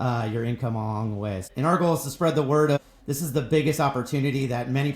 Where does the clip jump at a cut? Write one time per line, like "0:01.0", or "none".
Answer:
0:01.5
0:02.8